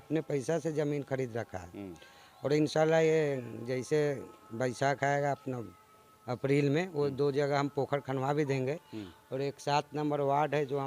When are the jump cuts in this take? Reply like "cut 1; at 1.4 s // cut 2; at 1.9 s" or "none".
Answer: none